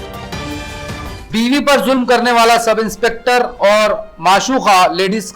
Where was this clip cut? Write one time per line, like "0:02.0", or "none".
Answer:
0:01.0